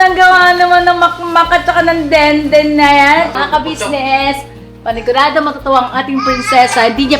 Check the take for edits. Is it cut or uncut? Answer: cut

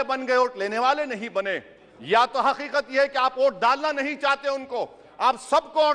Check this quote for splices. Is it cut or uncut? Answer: uncut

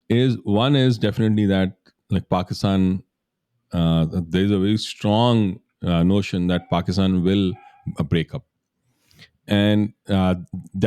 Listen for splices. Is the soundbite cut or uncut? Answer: uncut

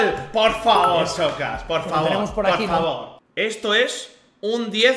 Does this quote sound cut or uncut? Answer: cut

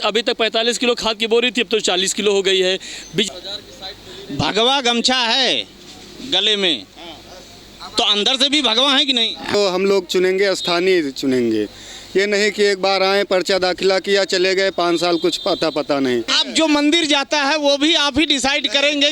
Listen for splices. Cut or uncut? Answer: cut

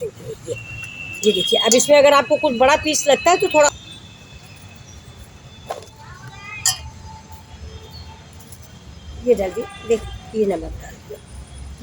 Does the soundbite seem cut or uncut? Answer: cut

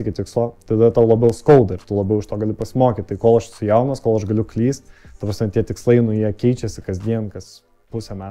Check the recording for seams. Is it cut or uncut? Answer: uncut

